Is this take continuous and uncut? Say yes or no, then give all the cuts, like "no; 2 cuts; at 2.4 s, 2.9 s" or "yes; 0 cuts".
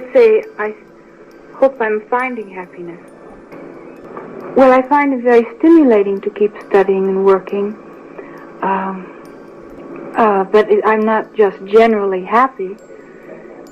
no; 1 cut; at 3.6 s